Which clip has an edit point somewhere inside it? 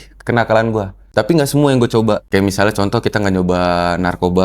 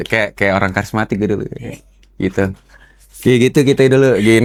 first; 2 cuts; at 1.1 s, 2.2 s

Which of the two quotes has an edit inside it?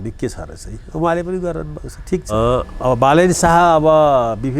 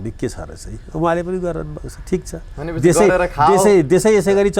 first; 1 cut; at 2.3 s

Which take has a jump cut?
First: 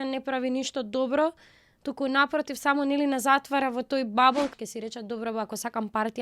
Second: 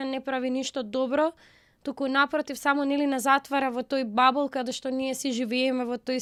first; 1 cut; at 4.5 s

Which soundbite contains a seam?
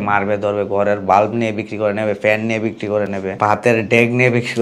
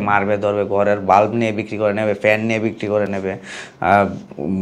first; 1 cut; at 3.4 s

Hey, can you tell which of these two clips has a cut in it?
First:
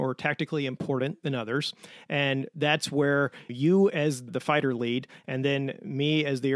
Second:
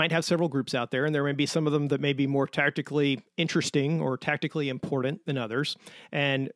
first; 2 cuts; at 3.4 s, 4.3 s

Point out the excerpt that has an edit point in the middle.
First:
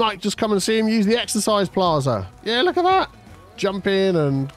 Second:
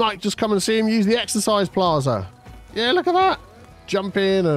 first; 1 cut; at 2.3 s

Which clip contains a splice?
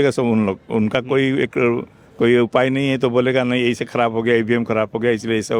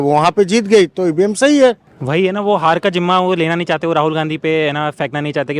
second; 1 cut; at 1.9 s

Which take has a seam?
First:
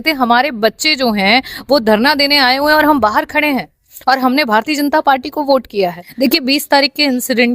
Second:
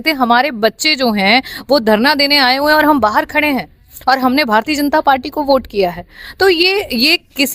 first; 1 cut; at 6.0 s

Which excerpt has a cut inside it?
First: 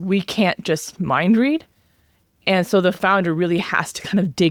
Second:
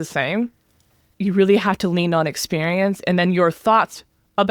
second; 1 cut; at 1.0 s

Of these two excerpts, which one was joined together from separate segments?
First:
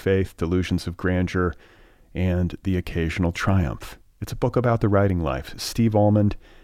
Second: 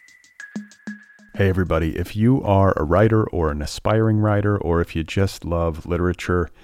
second; 1 cut; at 1.0 s

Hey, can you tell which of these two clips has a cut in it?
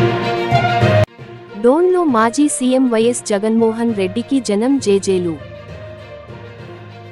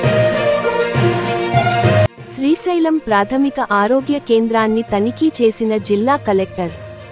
second; 1 cut; at 2.0 s

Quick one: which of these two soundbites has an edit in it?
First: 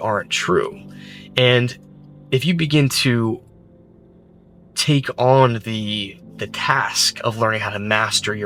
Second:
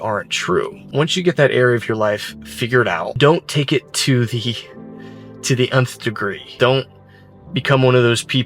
second; 3 cuts; at 0.8 s, 3.1 s, 6.5 s

